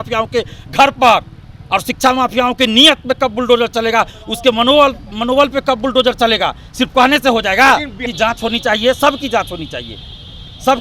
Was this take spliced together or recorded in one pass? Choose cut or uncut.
cut